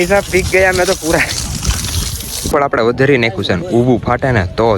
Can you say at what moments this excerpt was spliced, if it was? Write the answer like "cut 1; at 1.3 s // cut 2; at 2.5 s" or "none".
cut 1; at 2.4 s